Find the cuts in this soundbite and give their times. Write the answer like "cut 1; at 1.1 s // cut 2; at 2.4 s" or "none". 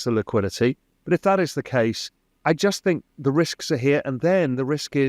none